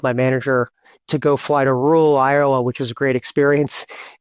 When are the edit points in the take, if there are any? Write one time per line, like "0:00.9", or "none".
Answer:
0:01.0